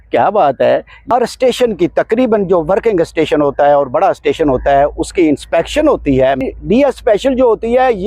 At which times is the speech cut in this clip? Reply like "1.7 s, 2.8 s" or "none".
1.0 s, 6.4 s